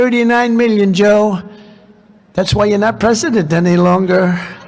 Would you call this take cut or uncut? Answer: uncut